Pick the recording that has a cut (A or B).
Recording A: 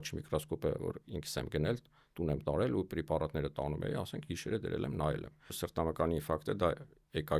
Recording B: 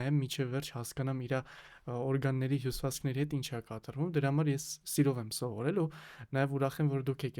A